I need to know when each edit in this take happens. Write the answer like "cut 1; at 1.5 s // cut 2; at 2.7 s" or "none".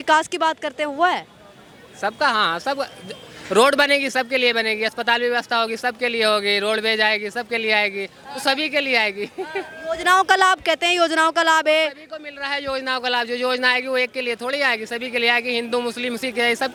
none